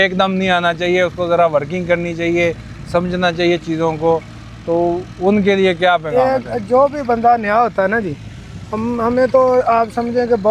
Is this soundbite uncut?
yes; 0 cuts

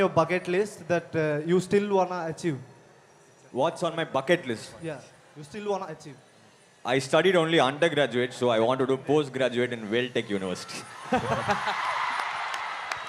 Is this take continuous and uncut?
yes; 0 cuts

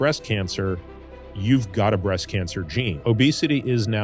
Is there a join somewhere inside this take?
yes; 1 cut; at 3.0 s

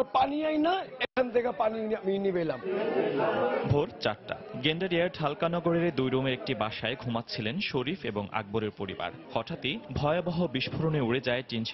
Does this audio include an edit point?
no; 0 cuts

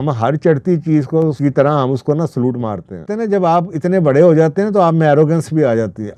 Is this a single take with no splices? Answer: no; 2 cuts; at 1.4 s, 3.1 s

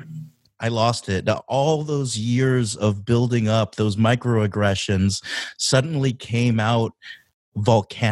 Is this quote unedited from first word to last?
yes; 0 cuts

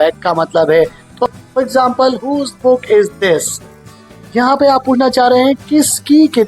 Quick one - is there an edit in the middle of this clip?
yes; 1 cut; at 1.4 s

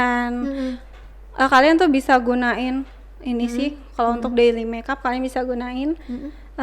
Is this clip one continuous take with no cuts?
yes; 0 cuts

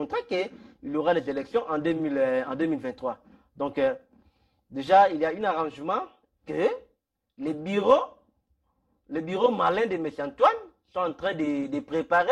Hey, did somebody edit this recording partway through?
no; 0 cuts

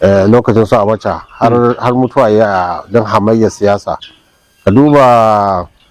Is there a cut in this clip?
no; 0 cuts

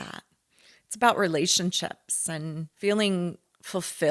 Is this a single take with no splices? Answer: no; 1 cut; at 2.7 s

